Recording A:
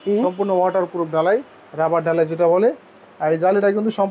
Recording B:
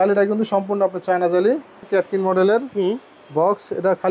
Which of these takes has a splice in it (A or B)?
B